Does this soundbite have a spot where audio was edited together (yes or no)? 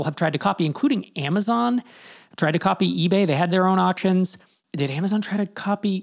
no